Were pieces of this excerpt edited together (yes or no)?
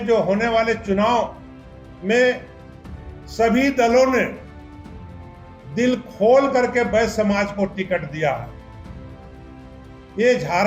no